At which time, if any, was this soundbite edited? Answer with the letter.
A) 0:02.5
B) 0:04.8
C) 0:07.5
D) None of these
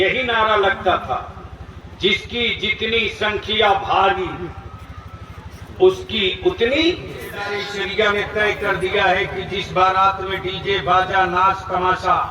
C